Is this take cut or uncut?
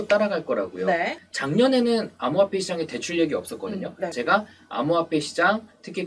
cut